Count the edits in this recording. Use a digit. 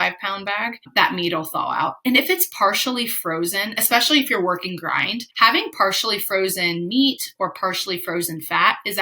2